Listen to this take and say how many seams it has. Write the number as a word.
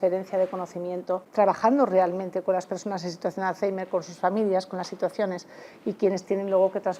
one